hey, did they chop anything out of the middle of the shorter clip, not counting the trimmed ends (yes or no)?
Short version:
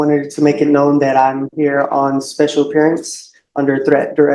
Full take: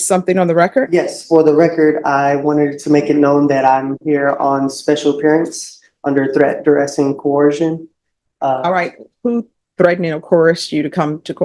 no